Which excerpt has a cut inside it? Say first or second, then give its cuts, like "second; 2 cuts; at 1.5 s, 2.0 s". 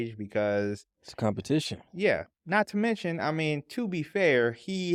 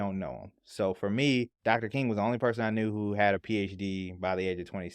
second; 1 cut; at 1.5 s